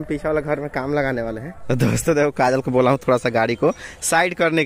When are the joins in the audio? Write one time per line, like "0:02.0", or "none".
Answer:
0:01.5